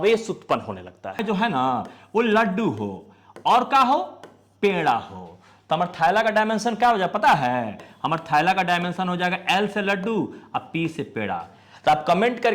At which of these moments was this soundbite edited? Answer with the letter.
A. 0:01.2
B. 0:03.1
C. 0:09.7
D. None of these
A